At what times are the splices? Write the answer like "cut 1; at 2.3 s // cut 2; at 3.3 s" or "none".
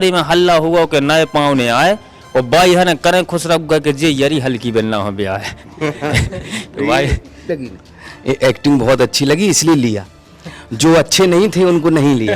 cut 1; at 7.4 s